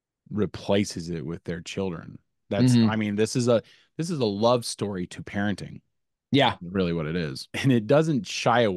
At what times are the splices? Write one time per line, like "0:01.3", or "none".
0:07.5